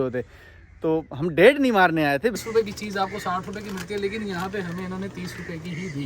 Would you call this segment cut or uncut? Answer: cut